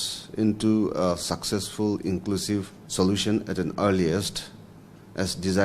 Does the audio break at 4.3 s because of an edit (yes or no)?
no